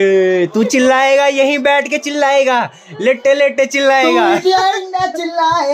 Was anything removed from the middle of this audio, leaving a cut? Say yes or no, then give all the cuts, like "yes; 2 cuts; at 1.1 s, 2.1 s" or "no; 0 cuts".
no; 0 cuts